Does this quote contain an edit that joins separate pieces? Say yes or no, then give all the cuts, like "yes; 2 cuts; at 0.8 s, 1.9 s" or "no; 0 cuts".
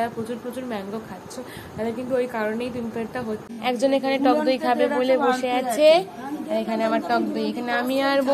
yes; 1 cut; at 3.5 s